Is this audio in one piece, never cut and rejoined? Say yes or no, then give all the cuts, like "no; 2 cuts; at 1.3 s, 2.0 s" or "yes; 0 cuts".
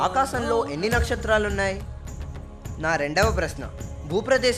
yes; 0 cuts